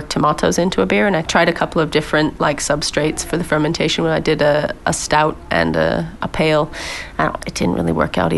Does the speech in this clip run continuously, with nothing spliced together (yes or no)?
no